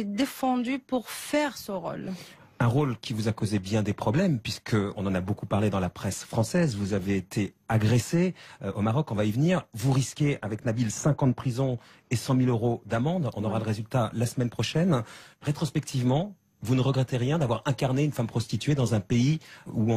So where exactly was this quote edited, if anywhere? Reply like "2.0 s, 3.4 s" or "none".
10.8 s